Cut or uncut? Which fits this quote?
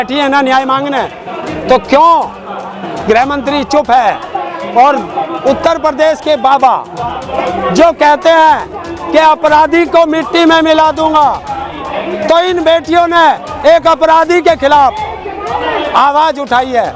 uncut